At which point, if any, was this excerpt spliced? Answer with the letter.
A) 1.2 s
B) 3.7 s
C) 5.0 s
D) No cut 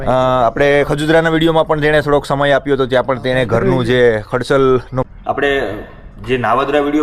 C